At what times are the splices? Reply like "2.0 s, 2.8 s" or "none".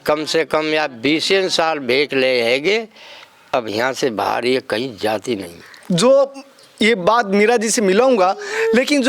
5.8 s